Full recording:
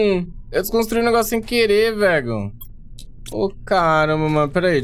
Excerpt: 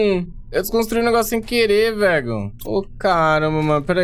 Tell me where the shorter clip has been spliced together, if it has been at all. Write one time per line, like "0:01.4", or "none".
0:02.5